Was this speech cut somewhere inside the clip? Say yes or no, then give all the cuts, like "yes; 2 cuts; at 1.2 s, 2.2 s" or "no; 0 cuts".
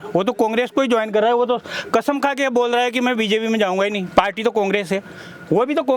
no; 0 cuts